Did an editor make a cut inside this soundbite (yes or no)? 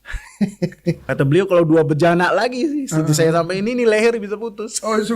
yes